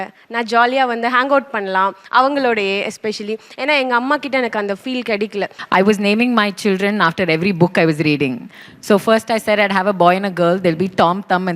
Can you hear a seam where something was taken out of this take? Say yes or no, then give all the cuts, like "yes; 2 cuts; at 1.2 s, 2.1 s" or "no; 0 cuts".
yes; 1 cut; at 5.5 s